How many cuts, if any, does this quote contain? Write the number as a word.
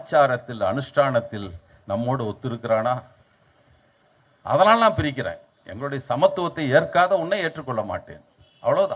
zero